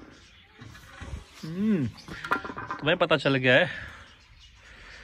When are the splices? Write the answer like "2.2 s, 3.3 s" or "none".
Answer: none